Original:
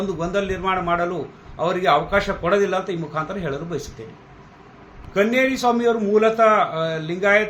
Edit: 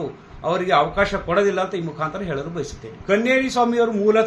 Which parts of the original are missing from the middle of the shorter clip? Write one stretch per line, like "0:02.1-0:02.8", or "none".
0:04.0-0:04.9